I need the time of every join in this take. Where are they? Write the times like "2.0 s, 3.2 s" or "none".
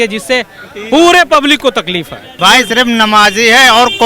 2.3 s